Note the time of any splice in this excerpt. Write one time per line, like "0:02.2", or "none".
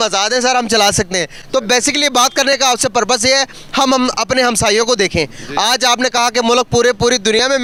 none